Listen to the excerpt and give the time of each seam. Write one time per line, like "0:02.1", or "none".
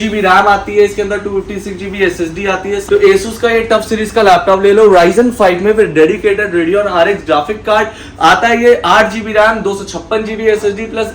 0:02.8